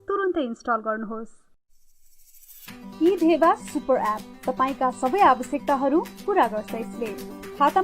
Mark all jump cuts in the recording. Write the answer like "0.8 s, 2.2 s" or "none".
1.5 s